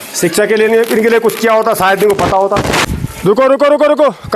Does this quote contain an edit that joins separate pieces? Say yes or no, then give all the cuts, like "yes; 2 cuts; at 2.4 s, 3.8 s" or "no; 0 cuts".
yes; 1 cut; at 2.9 s